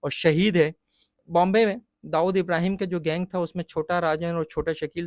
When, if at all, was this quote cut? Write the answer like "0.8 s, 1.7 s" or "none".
1.2 s

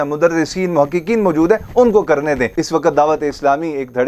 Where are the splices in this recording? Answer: 2.6 s

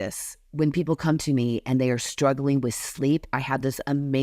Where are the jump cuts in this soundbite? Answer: none

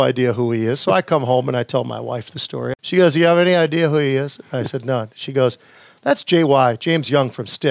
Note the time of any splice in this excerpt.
2.7 s

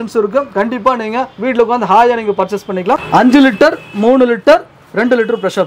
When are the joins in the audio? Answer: 3.0 s

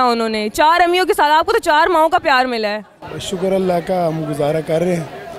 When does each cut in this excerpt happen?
none

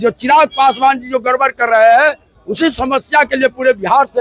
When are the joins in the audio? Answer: none

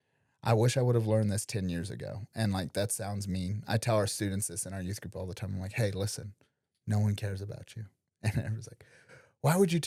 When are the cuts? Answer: none

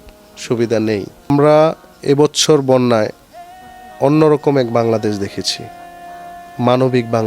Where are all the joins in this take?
1.3 s

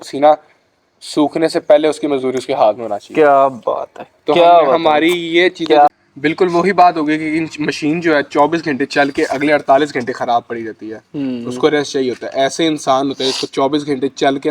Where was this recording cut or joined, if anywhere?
5.9 s

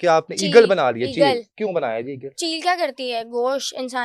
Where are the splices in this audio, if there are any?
2.3 s

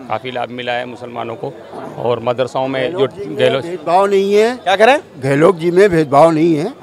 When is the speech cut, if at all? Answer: none

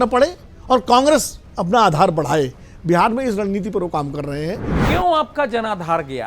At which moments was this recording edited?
4.7 s

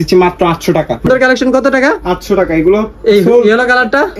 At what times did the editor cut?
1.1 s

